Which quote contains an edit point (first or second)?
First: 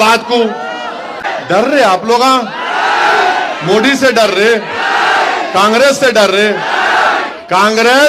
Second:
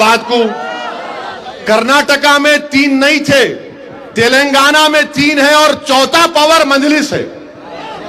first